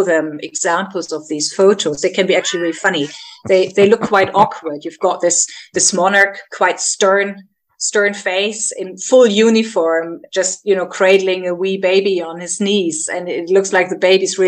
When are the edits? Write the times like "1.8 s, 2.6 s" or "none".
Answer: none